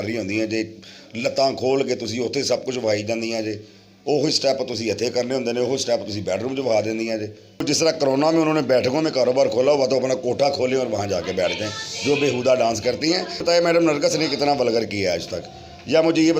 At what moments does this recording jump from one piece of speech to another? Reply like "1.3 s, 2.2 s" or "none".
7.6 s, 13.4 s